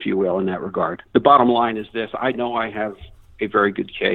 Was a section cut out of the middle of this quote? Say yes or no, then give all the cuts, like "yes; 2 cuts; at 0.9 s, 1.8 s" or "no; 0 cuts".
yes; 1 cut; at 1.0 s